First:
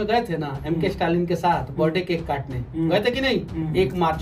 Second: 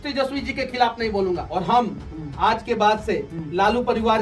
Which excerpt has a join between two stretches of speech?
second; 1 cut; at 1.5 s

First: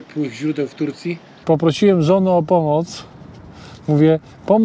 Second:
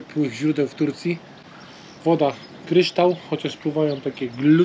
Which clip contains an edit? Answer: first; 1 cut; at 1.3 s

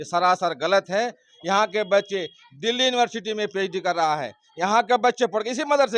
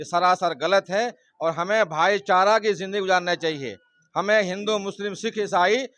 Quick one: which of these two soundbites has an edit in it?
first; 1 cut; at 1.3 s

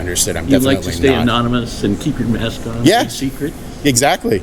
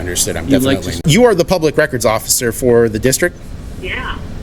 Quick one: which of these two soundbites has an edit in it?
second; 1 cut; at 1.0 s

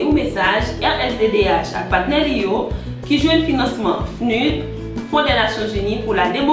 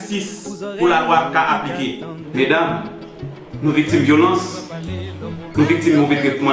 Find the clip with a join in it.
first; 1 cut; at 4.8 s

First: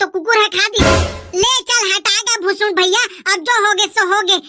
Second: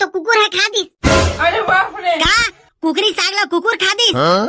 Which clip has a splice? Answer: first; 1 cut; at 1.0 s

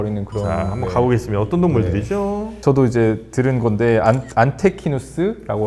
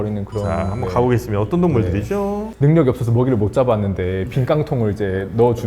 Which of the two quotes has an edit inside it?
second; 1 cut; at 2.5 s

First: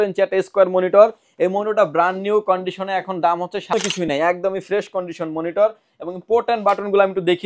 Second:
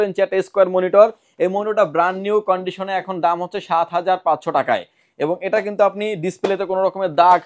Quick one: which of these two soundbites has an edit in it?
first; 1 cut; at 3.7 s

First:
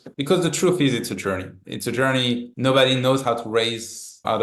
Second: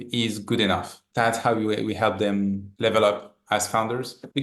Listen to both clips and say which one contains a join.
second; 1 cut; at 1.0 s

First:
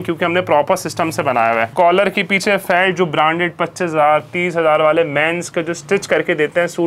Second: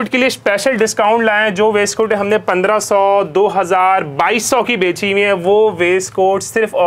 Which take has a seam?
first; 1 cut; at 1.7 s

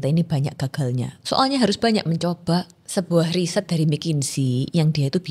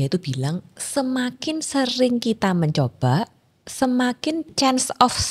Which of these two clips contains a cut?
first; 1 cut; at 2.8 s

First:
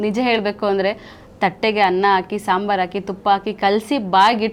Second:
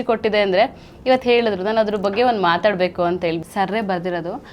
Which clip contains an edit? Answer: second; 1 cut; at 3.4 s

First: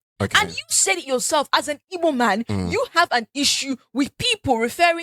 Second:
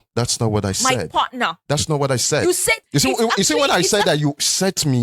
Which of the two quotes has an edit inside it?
second; 1 cut; at 2.9 s

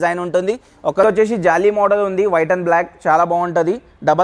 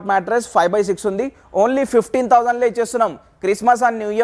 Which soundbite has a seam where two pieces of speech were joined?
first; 1 cut; at 1.0 s

